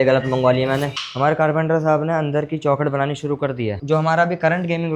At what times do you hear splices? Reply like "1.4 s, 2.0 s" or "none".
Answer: 1.0 s